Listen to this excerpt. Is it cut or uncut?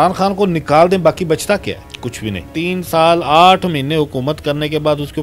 cut